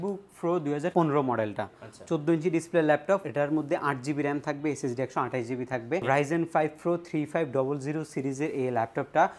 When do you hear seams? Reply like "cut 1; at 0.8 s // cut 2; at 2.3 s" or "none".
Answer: cut 1; at 0.9 s // cut 2; at 3.3 s // cut 3; at 6.0 s